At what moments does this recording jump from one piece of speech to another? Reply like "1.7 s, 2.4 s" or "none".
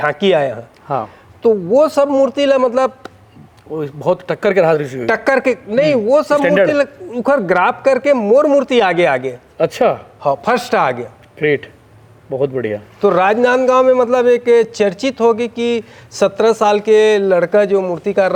none

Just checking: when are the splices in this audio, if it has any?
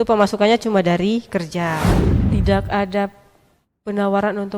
2.2 s

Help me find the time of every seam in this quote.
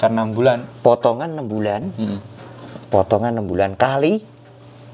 none

